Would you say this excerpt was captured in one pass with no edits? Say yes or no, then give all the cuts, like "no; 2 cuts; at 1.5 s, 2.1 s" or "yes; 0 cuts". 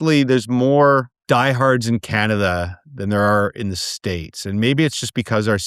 no; 1 cut; at 1.1 s